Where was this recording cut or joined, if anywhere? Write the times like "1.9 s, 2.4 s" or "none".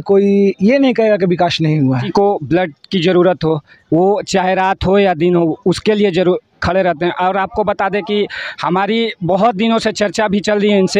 2.1 s